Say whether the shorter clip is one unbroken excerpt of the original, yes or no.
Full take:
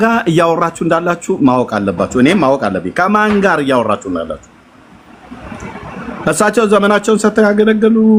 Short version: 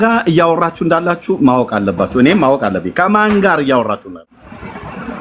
no